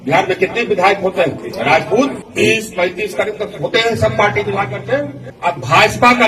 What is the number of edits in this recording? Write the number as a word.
three